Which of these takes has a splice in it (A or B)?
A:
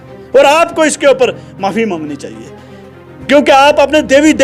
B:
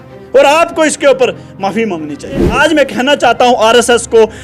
B